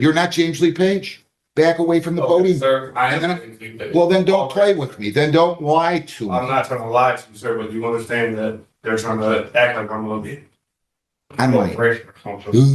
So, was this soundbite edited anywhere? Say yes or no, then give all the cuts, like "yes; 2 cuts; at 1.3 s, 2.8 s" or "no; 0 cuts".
no; 0 cuts